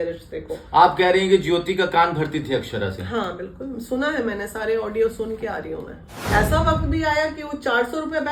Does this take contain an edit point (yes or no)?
yes